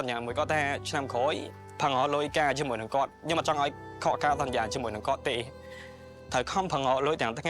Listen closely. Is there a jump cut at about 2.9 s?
no; 1 cut; at 1.5 s

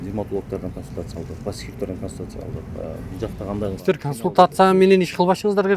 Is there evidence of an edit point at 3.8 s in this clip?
yes; 1 cut; at 3.8 s

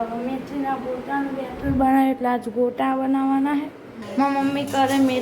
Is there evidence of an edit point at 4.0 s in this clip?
yes; 1 cut; at 4.0 s

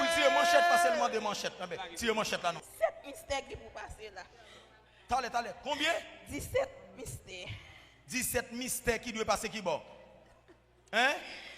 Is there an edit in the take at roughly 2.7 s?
yes; 1 cut; at 2.7 s

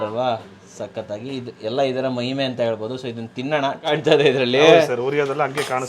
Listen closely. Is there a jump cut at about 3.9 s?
yes; 1 cut; at 3.9 s

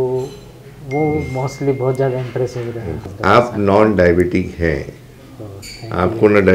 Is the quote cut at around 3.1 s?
yes; 1 cut; at 3.1 s

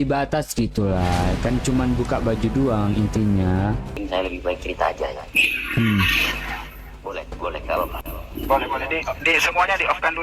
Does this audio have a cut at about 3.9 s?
yes; 1 cut; at 3.9 s

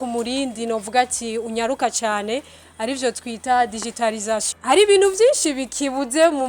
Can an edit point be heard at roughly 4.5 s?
yes; 1 cut; at 4.5 s

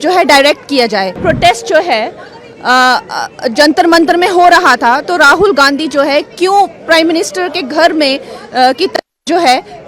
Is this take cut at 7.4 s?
no; 1 cut; at 1.2 s

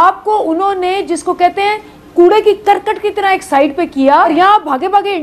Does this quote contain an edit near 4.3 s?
yes; 1 cut; at 4.3 s

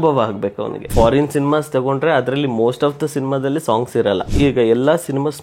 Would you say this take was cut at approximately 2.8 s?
no; 2 cuts; at 0.9 s, 4.3 s

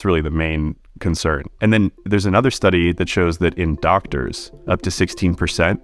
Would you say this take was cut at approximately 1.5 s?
yes; 2 cuts; at 1.5 s, 4.5 s

